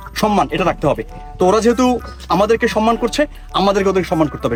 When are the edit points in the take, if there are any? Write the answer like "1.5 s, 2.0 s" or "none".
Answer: none